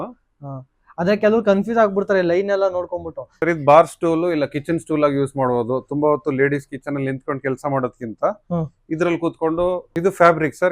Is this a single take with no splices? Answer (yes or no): no